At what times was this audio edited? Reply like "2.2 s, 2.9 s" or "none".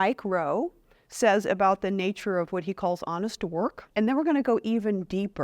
3.8 s